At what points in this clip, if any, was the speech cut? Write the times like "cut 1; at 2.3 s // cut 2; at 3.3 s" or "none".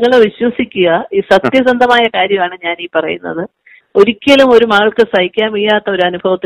none